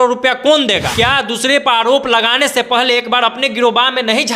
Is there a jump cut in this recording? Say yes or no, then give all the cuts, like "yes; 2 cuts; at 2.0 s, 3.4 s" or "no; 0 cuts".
yes; 1 cut; at 0.9 s